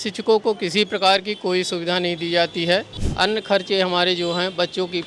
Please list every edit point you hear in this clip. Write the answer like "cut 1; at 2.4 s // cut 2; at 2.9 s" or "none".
cut 1; at 3.0 s